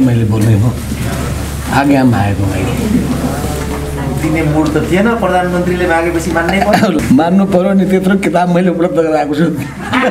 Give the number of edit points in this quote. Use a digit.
1